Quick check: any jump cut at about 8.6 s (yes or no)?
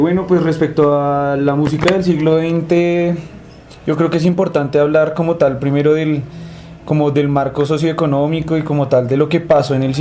no